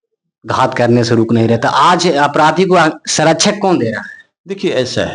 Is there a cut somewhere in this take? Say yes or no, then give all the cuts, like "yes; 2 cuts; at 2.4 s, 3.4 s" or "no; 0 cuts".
no; 0 cuts